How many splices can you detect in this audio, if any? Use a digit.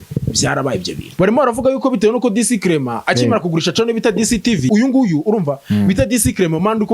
2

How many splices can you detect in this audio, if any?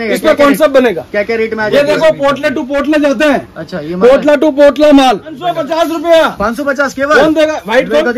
1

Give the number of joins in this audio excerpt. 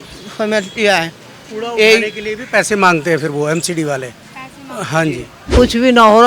1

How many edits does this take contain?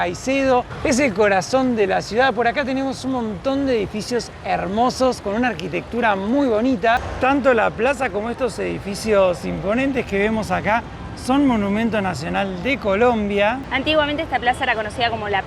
0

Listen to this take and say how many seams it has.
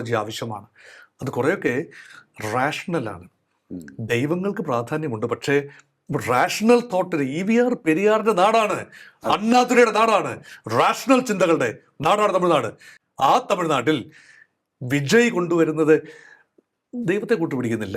0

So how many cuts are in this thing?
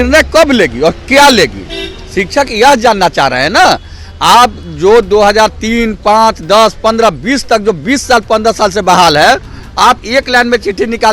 0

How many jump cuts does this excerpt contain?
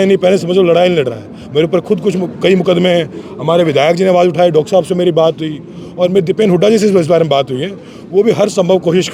0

